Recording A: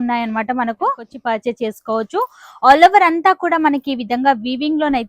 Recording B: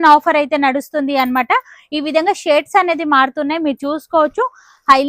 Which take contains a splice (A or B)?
A